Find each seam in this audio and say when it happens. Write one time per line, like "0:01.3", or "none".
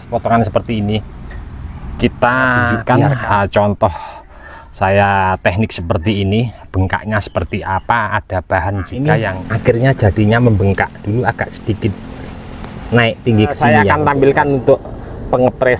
0:02.8
0:09.4
0:13.7